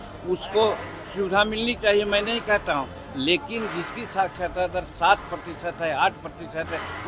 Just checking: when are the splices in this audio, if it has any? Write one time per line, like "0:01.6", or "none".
none

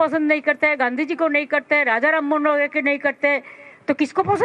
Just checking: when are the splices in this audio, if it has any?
none

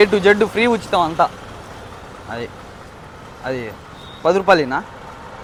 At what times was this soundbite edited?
none

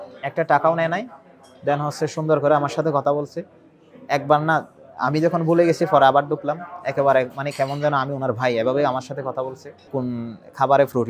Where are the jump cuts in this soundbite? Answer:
0:09.9

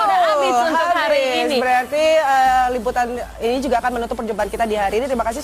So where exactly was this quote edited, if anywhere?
0:04.1

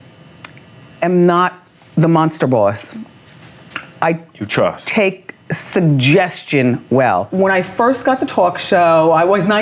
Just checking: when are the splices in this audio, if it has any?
0:07.3

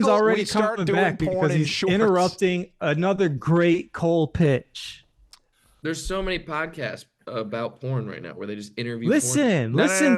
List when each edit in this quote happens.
none

